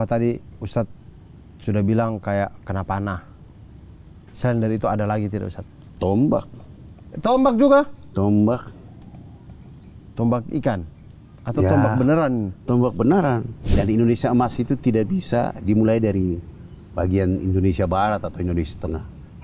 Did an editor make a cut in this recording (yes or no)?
yes